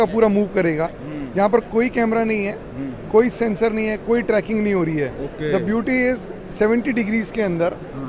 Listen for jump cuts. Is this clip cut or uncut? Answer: uncut